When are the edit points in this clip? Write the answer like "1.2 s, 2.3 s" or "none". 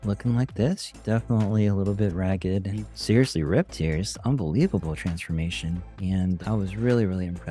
1.0 s, 3.0 s

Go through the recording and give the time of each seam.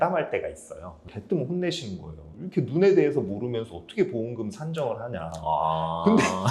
1.0 s

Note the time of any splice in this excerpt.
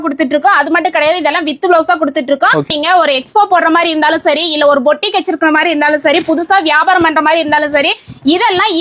2.7 s

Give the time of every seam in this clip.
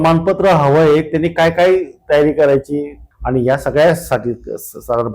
3.0 s

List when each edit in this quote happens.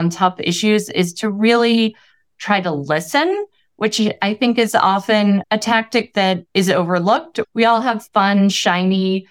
5.4 s, 6.5 s, 7.4 s

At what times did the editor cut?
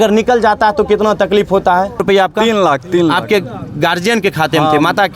2.0 s

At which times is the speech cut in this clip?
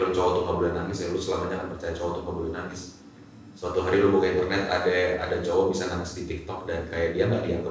none

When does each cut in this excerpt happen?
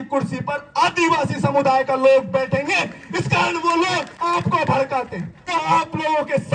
4.1 s, 5.4 s

